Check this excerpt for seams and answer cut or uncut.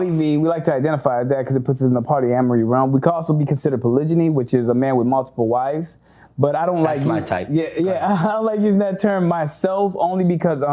uncut